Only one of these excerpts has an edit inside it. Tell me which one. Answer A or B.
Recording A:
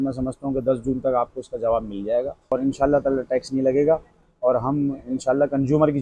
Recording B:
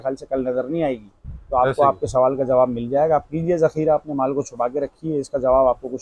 A